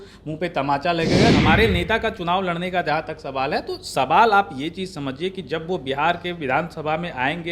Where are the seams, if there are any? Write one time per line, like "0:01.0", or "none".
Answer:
0:01.4

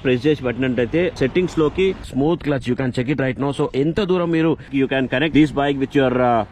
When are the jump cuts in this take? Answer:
0:01.1
0:02.0
0:04.9

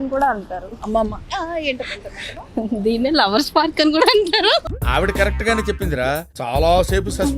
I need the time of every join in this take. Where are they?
0:04.6
0:06.3

